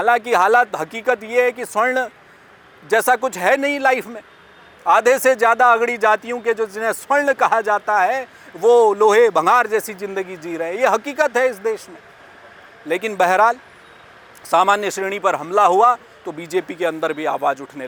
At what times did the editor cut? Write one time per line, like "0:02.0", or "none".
none